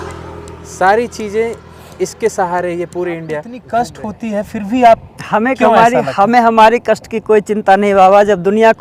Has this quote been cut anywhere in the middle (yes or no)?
yes